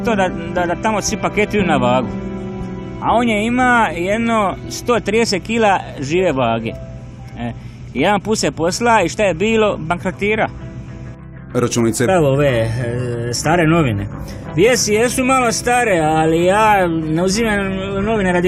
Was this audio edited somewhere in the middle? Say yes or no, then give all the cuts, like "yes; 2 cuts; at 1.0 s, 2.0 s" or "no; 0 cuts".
no; 0 cuts